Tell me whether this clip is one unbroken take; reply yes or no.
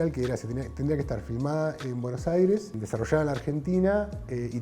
no